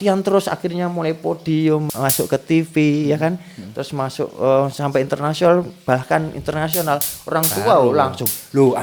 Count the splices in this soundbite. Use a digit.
1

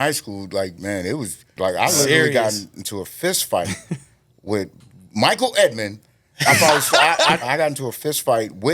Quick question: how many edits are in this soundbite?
2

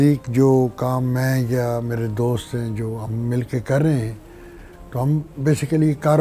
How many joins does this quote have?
0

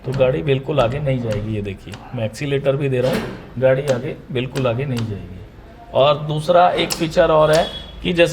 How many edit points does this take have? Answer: 0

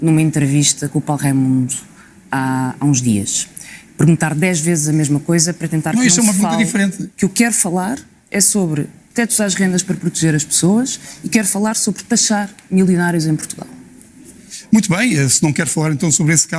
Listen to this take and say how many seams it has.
1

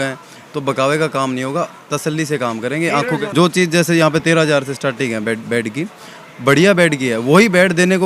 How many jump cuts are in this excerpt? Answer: 1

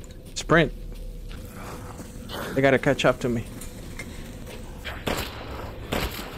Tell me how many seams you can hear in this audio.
2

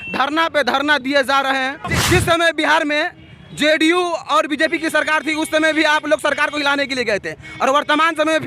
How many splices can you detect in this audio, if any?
1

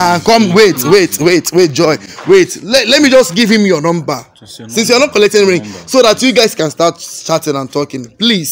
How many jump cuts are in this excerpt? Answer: 0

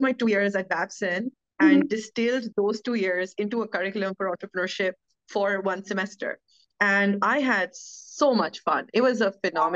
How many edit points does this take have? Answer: 0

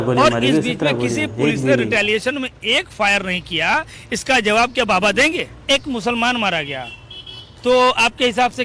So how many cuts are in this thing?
1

